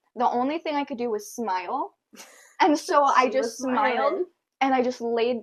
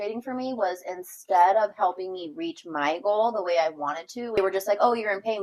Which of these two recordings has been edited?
second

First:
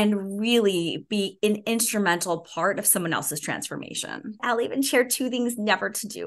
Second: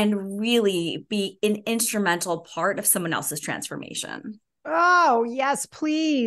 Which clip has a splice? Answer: first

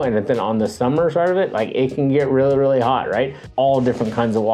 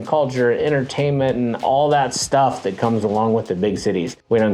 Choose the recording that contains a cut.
first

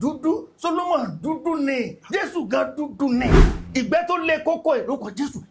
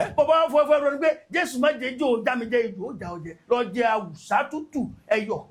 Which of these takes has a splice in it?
first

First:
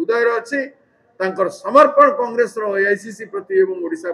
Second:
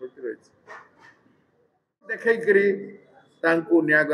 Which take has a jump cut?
second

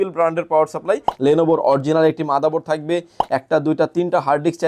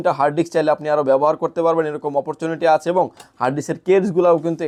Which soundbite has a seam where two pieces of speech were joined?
first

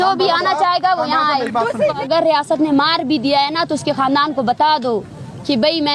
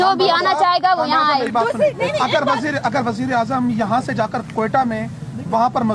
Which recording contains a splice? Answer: first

